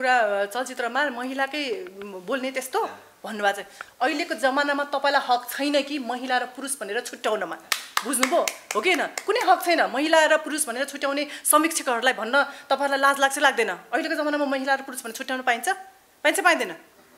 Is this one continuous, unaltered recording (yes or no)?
yes